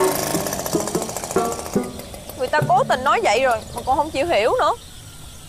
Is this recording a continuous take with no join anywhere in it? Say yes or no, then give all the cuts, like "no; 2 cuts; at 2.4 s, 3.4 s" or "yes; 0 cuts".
yes; 0 cuts